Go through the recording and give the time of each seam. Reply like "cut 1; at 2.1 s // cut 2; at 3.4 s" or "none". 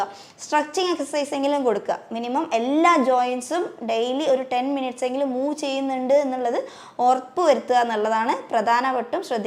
none